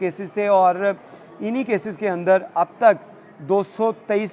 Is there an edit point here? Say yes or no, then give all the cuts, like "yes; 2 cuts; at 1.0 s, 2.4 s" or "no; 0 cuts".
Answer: no; 0 cuts